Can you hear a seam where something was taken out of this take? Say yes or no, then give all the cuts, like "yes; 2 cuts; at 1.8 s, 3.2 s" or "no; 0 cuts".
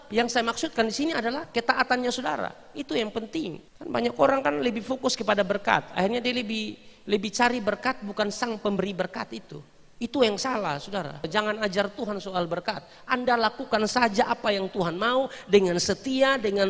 yes; 3 cuts; at 1.5 s, 3.7 s, 11.3 s